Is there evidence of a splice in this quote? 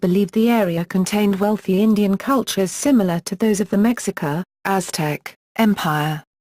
yes; 1 cut; at 5.0 s

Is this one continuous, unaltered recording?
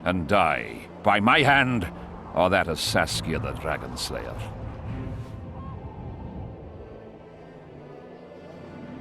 yes; 0 cuts

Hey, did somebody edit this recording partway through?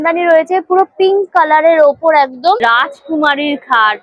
yes; 1 cut; at 2.6 s

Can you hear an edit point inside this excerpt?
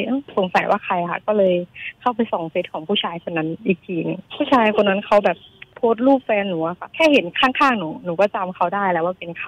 no; 0 cuts

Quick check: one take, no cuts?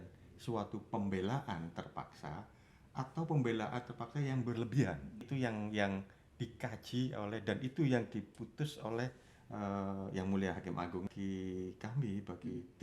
no; 2 cuts; at 5.2 s, 11.1 s

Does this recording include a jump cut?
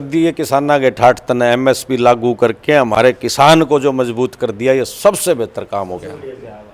no; 0 cuts

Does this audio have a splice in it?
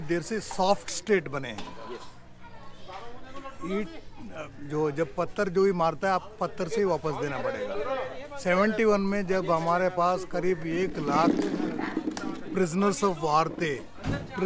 no; 0 cuts

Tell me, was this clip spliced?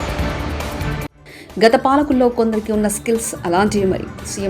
yes; 1 cut; at 1.2 s

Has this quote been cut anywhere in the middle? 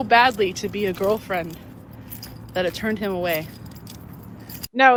no; 0 cuts

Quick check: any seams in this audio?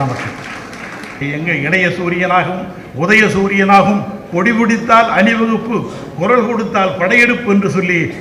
yes; 1 cut; at 1.2 s

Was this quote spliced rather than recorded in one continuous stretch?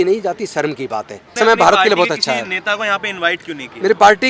yes; 1 cut; at 1.4 s

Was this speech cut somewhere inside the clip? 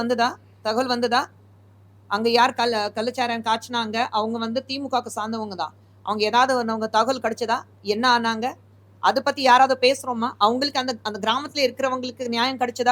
no; 0 cuts

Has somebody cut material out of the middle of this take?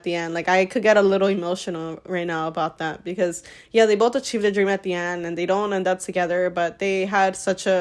no; 0 cuts

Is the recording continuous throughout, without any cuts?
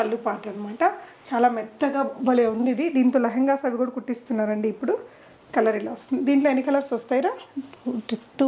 yes; 0 cuts

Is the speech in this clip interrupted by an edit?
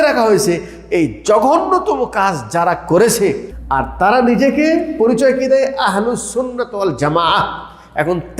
yes; 1 cut; at 3.5 s

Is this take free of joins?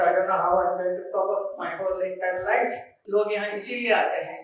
no; 1 cut; at 2.9 s

